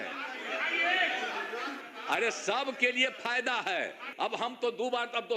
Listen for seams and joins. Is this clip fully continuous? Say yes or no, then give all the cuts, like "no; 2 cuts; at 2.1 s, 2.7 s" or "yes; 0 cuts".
no; 2 cuts; at 1.8 s, 4.1 s